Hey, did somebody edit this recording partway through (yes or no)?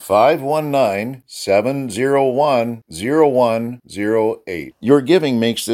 no